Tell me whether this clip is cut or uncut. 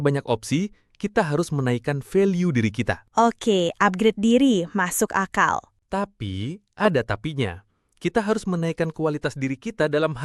uncut